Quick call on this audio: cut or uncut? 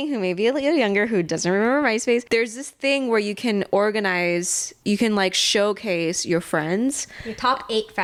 uncut